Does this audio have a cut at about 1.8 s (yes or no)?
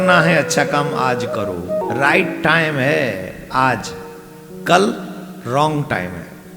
yes